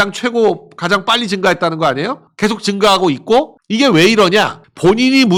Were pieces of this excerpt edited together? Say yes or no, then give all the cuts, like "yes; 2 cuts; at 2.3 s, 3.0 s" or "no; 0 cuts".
no; 0 cuts